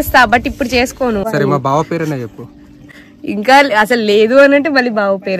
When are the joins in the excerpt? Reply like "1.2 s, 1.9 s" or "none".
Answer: 1.3 s